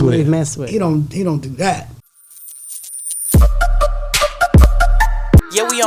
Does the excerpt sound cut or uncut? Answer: cut